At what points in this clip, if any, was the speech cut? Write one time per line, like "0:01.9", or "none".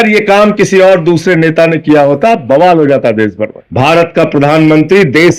0:03.6